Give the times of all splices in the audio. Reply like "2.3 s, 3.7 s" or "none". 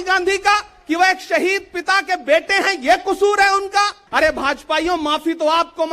4.0 s